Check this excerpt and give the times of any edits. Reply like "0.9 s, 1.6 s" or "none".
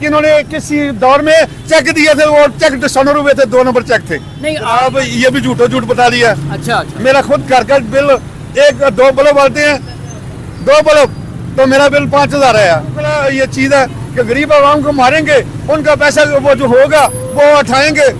4.6 s, 13.1 s